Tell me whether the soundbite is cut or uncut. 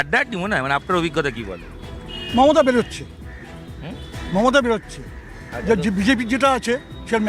uncut